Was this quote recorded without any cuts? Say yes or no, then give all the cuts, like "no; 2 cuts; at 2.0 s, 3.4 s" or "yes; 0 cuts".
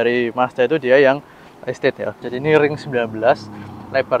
no; 1 cut; at 2.2 s